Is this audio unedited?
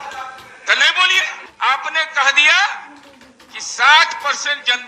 no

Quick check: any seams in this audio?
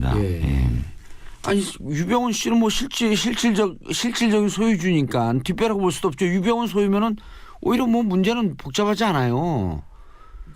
yes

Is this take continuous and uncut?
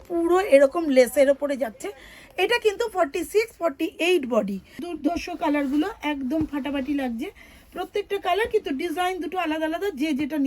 no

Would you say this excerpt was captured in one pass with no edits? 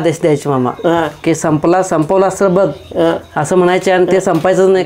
yes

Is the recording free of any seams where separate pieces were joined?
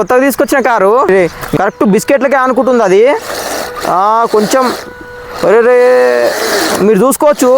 no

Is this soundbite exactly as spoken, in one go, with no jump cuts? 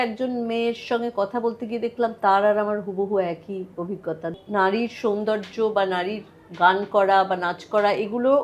no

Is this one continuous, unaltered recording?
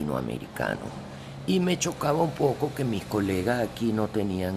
yes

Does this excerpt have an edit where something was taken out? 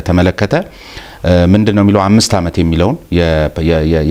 no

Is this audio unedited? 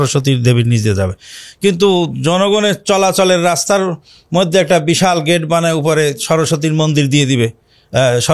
yes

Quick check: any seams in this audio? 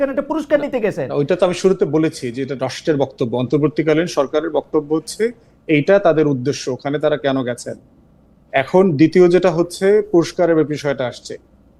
no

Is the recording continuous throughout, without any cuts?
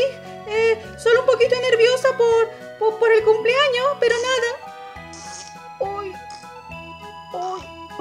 no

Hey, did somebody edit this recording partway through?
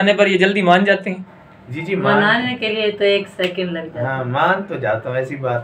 no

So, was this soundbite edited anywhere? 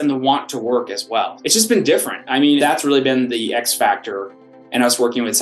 yes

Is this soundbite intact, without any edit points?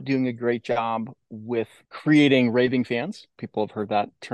no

